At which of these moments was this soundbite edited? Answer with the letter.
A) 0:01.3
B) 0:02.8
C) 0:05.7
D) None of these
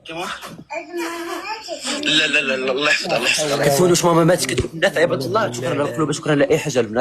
C